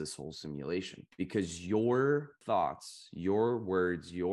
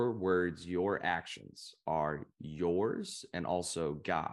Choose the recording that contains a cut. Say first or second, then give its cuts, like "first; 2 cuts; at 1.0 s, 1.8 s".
first; 2 cuts; at 1.0 s, 2.4 s